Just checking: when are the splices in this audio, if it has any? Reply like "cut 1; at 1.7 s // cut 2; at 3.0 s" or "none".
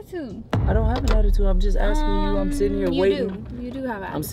none

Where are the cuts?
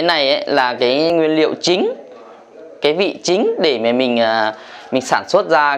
cut 1; at 1.1 s

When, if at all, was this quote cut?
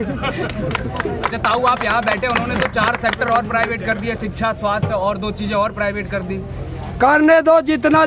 none

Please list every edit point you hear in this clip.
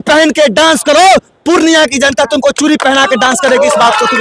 none

